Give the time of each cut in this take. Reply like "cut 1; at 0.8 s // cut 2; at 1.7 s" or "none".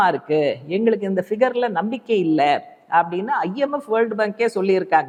none